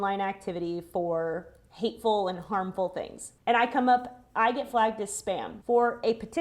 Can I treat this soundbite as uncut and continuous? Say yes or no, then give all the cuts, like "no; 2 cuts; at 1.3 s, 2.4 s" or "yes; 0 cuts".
no; 2 cuts; at 3.3 s, 5.6 s